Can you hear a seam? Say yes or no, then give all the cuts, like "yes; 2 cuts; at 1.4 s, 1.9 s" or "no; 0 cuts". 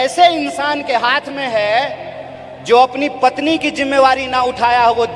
no; 0 cuts